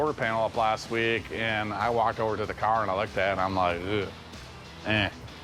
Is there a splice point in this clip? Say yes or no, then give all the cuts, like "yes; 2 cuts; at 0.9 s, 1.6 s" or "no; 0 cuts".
no; 0 cuts